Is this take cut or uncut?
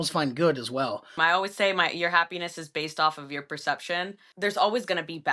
cut